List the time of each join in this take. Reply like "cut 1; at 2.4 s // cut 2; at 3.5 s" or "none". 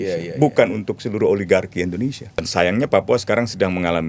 cut 1; at 2.5 s

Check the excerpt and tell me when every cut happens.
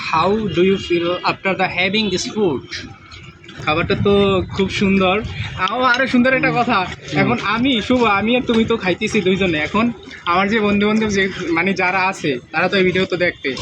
cut 1; at 3.5 s

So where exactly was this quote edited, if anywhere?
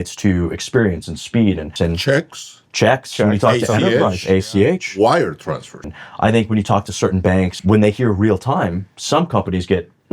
cut 1; at 1.7 s // cut 2; at 5.9 s // cut 3; at 7.5 s

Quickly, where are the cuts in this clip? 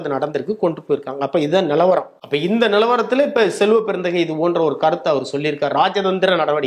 cut 1; at 2.2 s

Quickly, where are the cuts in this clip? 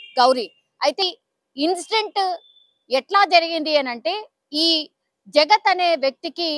cut 1; at 1.0 s

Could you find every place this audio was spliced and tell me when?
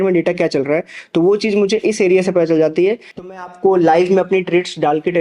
cut 1; at 3.5 s

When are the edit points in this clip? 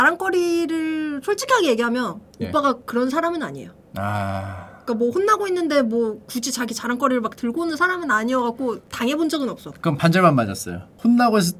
none

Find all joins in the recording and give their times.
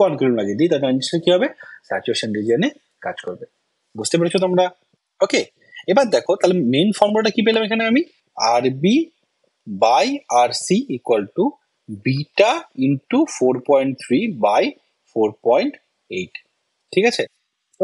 none

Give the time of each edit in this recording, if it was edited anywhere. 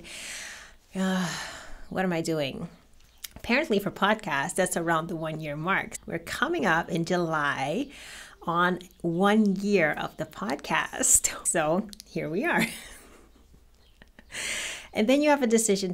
cut 1; at 5.9 s // cut 2; at 11.4 s

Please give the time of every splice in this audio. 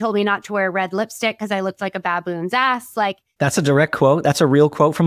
cut 1; at 3.3 s

